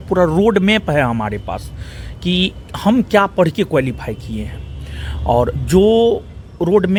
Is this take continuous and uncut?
yes; 0 cuts

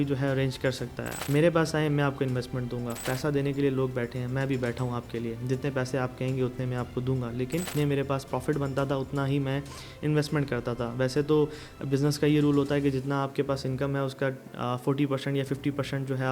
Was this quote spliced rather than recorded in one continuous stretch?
yes; 3 cuts; at 1.1 s, 3.0 s, 7.7 s

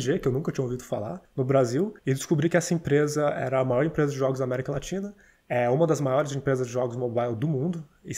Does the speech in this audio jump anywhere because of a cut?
yes; 2 cuts; at 1.2 s, 2.0 s

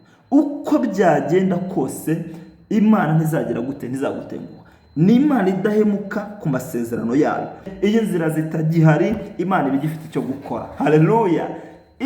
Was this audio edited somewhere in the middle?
yes; 1 cut; at 7.6 s

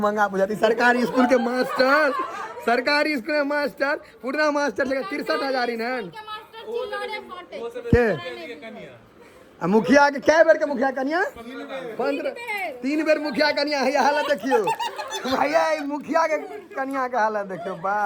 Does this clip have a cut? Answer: no; 0 cuts

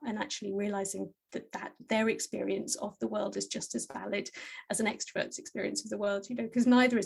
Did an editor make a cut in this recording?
no; 0 cuts

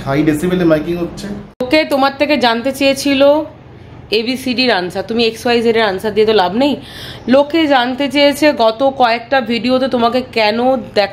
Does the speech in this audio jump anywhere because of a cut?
yes; 1 cut; at 1.5 s

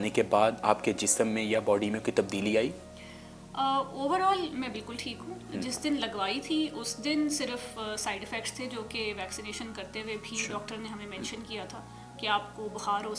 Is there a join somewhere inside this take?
no; 0 cuts

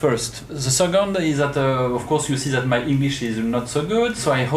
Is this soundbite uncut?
no; 1 cut; at 3.2 s

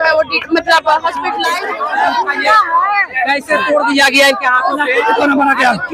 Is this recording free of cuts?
no; 1 cut; at 1.5 s

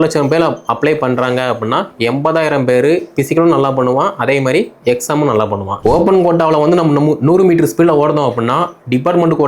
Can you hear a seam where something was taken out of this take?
yes; 1 cut; at 5.7 s

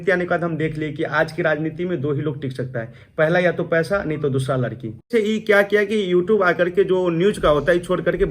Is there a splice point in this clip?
yes; 1 cut; at 5.1 s

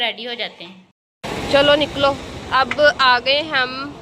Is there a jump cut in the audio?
yes; 1 cut; at 1.1 s

